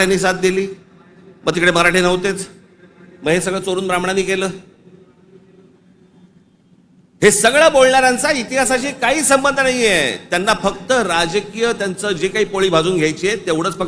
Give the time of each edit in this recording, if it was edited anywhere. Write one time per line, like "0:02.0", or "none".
none